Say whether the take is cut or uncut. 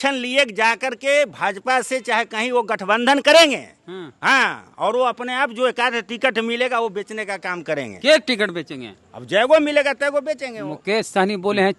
uncut